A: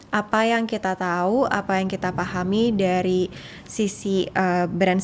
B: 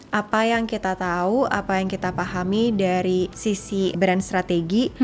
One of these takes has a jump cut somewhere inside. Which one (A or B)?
B